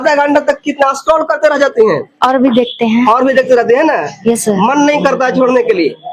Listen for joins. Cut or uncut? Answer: uncut